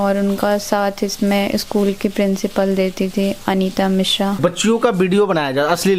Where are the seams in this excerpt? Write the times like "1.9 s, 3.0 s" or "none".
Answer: 4.4 s